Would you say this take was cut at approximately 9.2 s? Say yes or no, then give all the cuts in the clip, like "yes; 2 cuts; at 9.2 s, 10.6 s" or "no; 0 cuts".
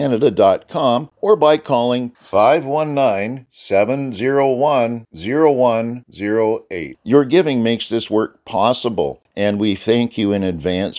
yes; 2 cuts; at 1.1 s, 9.2 s